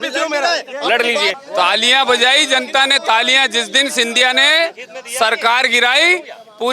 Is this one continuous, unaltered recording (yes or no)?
no